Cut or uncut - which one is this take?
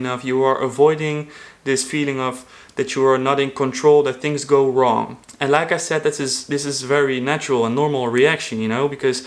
cut